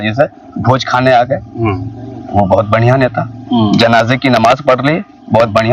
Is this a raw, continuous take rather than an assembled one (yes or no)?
yes